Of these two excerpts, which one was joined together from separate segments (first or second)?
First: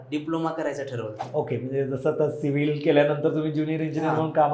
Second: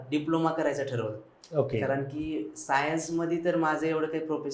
first